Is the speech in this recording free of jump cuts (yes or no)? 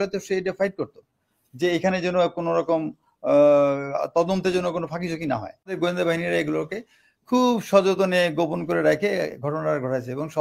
no